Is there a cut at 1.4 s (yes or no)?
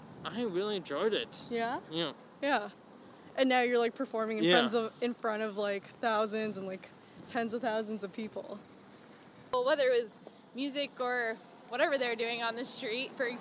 no